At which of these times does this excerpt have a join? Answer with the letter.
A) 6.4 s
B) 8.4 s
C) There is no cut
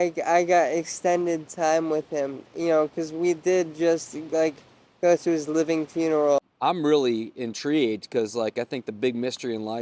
A